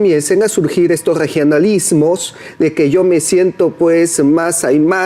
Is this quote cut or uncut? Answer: uncut